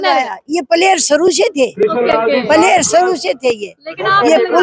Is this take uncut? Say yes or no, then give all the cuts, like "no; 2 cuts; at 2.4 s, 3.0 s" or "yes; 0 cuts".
yes; 0 cuts